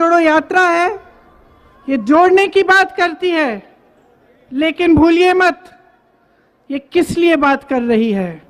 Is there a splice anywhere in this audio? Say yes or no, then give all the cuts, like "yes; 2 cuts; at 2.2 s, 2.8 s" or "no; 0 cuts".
no; 0 cuts